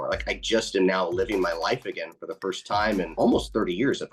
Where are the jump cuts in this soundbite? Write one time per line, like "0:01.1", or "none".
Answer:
0:03.1